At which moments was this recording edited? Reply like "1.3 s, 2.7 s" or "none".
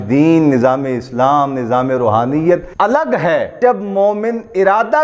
2.7 s, 3.6 s